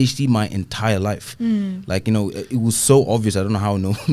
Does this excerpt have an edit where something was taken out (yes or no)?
no